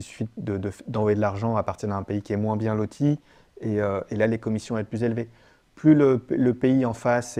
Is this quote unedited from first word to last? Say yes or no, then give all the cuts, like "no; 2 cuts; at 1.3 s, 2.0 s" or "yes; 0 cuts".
yes; 0 cuts